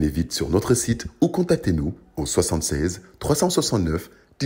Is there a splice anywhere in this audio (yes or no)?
no